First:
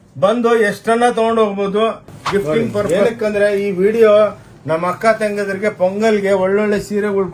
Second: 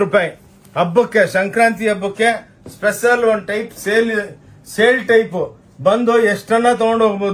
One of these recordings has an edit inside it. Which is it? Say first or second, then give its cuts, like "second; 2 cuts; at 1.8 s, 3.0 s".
first; 1 cut; at 2.9 s